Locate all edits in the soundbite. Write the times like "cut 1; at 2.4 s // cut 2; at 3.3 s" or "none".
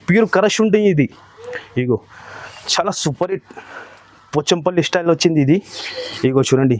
none